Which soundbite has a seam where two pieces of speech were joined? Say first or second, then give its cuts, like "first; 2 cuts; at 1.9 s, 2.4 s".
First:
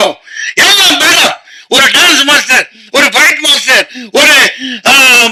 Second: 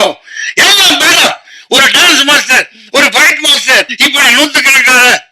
second; 1 cut; at 3.9 s